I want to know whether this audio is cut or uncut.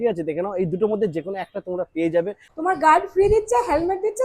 cut